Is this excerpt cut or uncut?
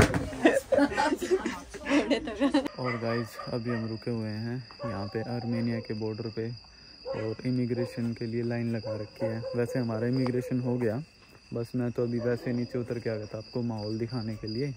uncut